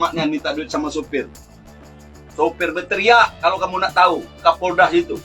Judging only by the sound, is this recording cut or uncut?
uncut